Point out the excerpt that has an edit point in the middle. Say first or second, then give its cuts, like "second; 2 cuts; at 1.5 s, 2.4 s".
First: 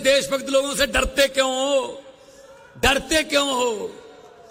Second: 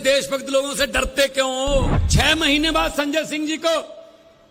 second; 1 cut; at 2.0 s